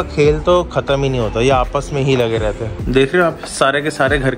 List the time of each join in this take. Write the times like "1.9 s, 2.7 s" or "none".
2.7 s